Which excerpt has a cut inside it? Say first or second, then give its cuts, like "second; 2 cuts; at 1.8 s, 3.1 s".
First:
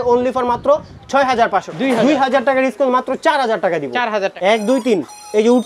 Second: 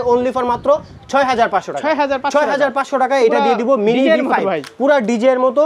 first; 2 cuts; at 1.7 s, 4.3 s